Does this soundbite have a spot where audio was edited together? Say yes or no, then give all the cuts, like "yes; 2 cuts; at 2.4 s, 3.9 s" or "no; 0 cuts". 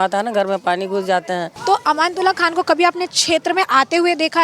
yes; 1 cut; at 1.5 s